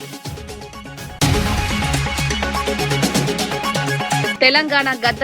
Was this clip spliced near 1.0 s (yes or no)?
yes